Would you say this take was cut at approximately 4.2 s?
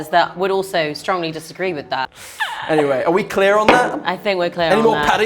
no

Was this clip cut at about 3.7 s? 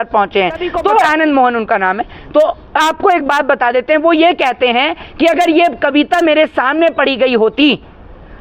no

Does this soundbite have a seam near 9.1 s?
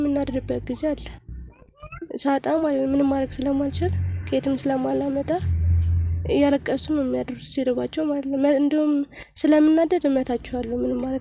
no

